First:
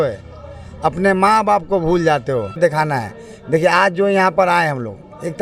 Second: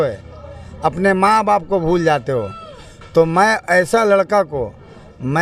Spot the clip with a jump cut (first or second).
first